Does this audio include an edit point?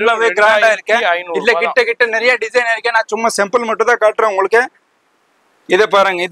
no; 0 cuts

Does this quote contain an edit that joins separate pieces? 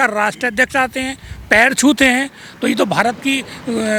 no; 0 cuts

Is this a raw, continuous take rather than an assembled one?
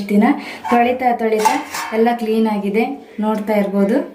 yes; 0 cuts

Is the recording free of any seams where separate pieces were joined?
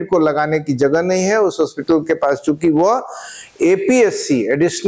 yes; 0 cuts

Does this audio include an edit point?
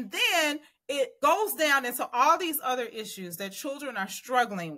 yes; 1 cut; at 1.1 s

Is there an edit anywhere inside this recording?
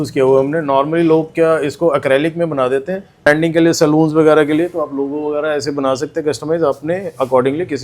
yes; 1 cut; at 3.3 s

